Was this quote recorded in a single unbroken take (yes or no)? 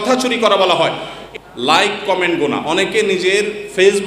no